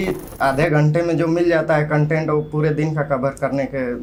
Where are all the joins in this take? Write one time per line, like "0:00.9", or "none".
none